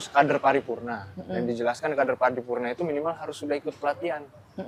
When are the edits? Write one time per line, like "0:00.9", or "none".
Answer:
none